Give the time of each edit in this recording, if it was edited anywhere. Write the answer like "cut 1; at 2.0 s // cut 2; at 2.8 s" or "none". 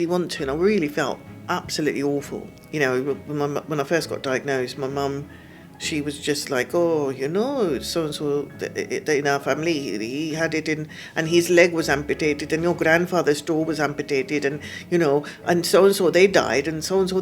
cut 1; at 2.5 s